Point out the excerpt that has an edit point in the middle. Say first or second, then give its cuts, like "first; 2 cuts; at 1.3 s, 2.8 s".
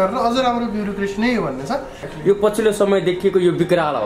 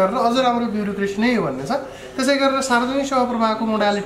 first; 1 cut; at 2.1 s